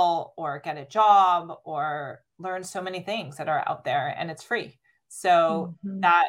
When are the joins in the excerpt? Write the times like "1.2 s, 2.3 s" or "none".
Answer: 2.3 s